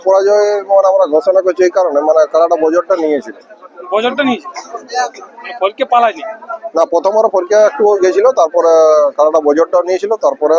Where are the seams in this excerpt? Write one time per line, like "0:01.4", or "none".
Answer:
none